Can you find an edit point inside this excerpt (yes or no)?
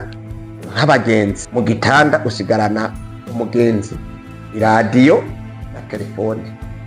yes